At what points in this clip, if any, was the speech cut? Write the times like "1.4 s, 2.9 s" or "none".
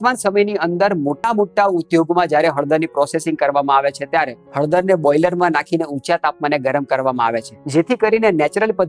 1.3 s, 4.4 s, 7.5 s